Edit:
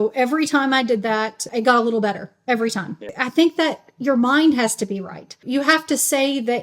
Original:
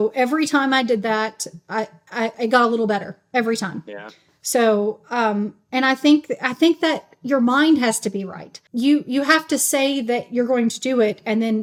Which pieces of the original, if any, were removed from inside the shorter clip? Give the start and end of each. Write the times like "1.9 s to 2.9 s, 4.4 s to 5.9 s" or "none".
1.5 s to 2.3 s, 4.0 s to 6.4 s, 8.7 s to 9.1 s